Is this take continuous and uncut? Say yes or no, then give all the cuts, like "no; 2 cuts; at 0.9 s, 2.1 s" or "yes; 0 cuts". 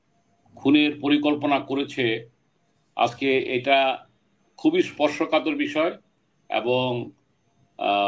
yes; 0 cuts